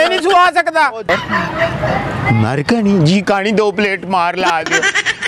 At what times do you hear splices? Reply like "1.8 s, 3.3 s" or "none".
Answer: 1.1 s